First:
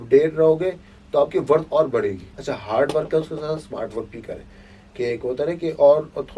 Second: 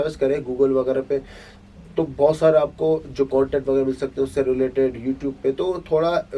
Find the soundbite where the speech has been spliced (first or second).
first